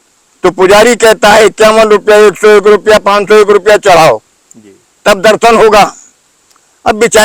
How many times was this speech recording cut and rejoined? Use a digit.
0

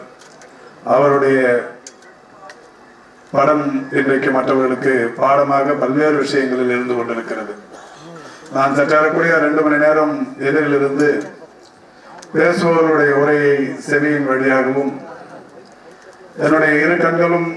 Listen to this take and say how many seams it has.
0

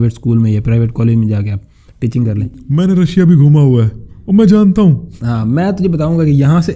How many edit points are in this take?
1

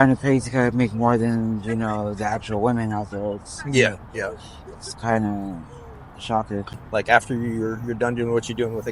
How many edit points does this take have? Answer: 1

